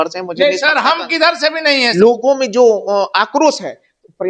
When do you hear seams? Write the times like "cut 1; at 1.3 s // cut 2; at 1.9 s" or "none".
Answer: cut 1; at 1.9 s

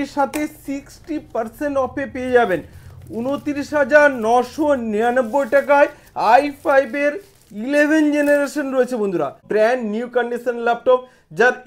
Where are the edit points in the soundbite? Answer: cut 1; at 9.4 s

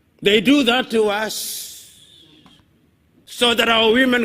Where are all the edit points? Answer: cut 1; at 3.2 s

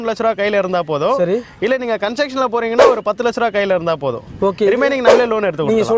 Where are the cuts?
none

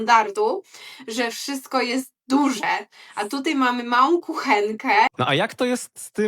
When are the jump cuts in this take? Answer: cut 1; at 5.1 s

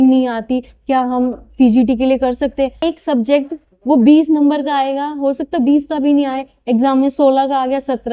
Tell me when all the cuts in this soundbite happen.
cut 1; at 2.8 s

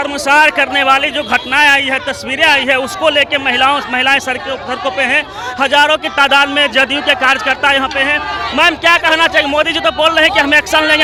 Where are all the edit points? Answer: none

